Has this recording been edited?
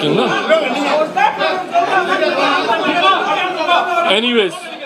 no; 0 cuts

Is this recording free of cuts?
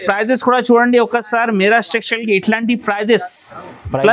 yes; 0 cuts

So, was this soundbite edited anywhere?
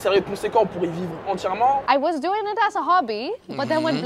yes; 1 cut; at 1.8 s

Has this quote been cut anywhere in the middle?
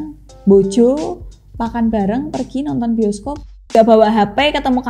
yes; 1 cut; at 3.6 s

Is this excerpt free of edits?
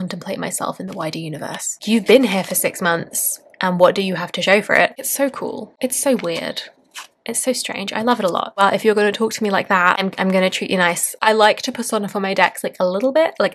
no; 4 cuts; at 1.8 s, 5.0 s, 8.5 s, 11.2 s

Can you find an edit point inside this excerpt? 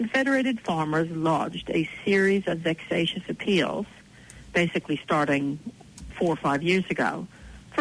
no; 0 cuts

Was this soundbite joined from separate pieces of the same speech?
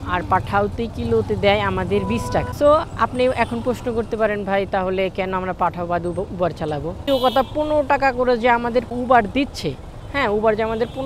yes; 3 cuts; at 2.5 s, 7.0 s, 8.9 s

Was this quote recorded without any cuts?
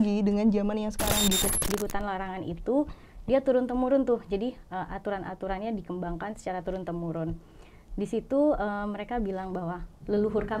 no; 1 cut; at 1.5 s

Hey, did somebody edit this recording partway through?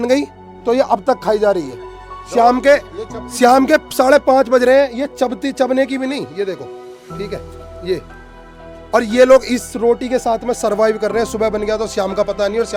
no; 0 cuts

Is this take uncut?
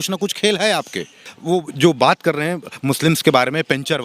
no; 1 cut; at 1.2 s

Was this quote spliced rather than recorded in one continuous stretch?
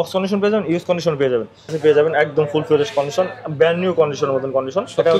yes; 1 cut; at 1.8 s

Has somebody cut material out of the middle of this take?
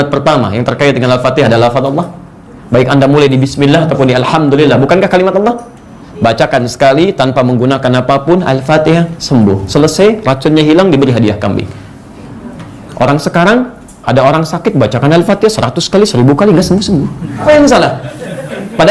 yes; 1 cut; at 17.4 s

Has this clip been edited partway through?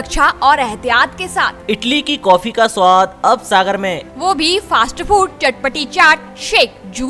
no; 0 cuts

